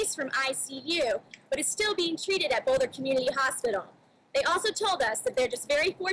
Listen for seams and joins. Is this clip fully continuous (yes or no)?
yes